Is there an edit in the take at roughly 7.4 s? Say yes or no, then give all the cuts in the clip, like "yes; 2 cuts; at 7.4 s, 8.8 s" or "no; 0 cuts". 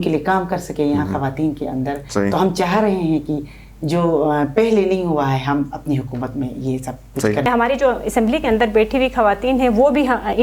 yes; 1 cut; at 7.4 s